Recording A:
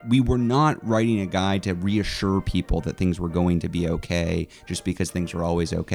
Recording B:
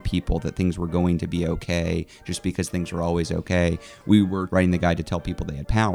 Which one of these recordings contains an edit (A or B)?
B